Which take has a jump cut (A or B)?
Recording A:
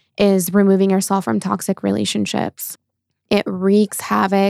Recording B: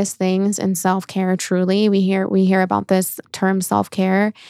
A